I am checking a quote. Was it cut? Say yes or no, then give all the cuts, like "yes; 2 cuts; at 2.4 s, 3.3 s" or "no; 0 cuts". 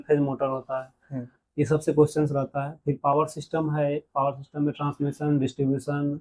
no; 0 cuts